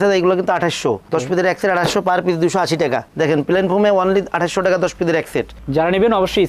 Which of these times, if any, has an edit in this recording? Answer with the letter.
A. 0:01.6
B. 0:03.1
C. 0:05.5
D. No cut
D